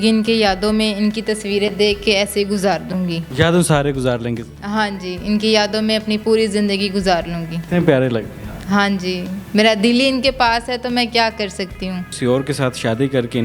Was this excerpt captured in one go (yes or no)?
yes